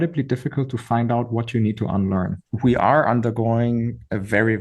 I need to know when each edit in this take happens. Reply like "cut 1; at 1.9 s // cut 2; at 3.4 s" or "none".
cut 1; at 2.4 s